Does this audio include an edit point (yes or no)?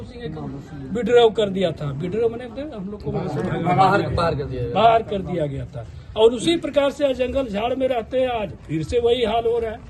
no